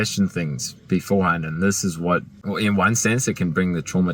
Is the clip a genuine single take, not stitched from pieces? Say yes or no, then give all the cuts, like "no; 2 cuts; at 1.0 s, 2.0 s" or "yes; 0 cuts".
no; 1 cut; at 2.3 s